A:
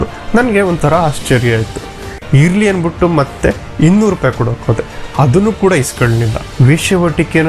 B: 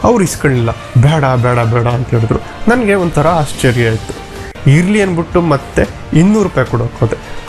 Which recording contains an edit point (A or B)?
A